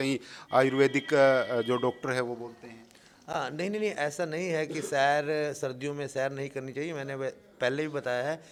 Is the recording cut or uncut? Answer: uncut